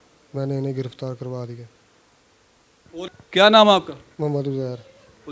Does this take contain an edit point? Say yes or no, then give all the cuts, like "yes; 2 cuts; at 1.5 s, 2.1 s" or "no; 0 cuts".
yes; 1 cut; at 3.1 s